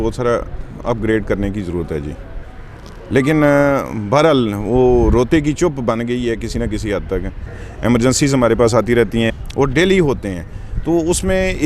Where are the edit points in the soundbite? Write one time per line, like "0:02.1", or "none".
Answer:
0:07.6
0:09.3